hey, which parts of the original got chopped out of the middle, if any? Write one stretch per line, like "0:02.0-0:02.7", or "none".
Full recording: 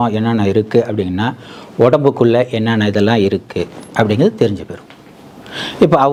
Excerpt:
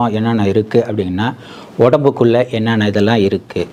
none